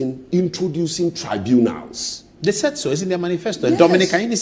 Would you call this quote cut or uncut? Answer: uncut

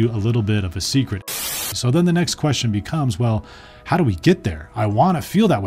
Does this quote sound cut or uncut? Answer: cut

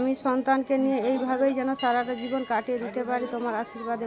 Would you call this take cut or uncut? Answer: uncut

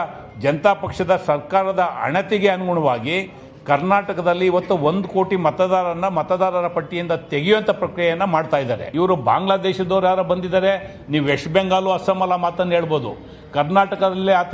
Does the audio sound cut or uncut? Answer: cut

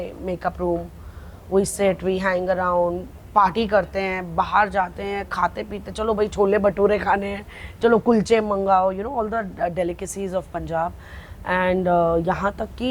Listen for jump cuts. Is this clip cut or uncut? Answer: uncut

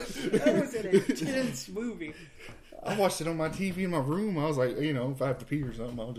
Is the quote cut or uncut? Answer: uncut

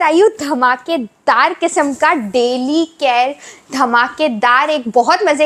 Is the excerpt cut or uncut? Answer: uncut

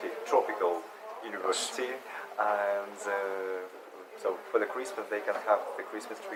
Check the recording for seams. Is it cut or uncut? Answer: uncut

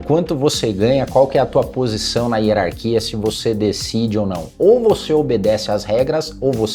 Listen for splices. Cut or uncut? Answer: uncut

